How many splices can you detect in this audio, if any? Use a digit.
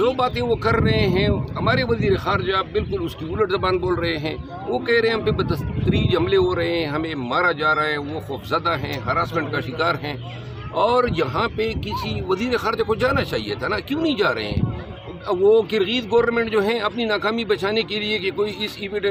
0